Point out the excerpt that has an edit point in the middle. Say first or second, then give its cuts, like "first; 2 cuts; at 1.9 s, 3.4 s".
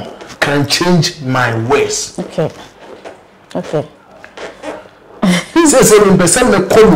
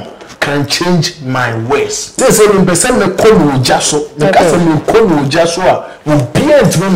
second; 1 cut; at 2.2 s